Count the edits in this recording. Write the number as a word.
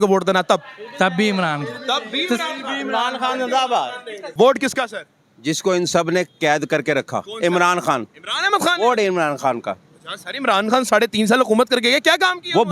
two